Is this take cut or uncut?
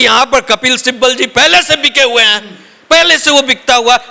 uncut